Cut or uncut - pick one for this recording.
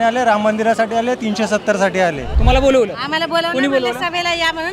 cut